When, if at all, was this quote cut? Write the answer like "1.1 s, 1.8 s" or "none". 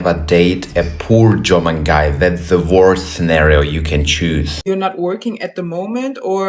4.6 s